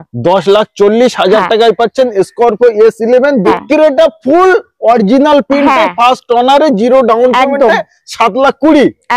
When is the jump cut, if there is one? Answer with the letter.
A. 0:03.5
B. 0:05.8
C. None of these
A